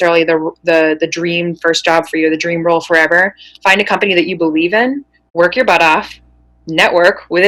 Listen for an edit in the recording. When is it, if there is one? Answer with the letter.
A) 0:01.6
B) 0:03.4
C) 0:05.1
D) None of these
C